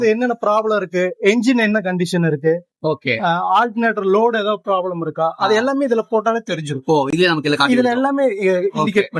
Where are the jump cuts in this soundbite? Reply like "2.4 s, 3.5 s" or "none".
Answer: none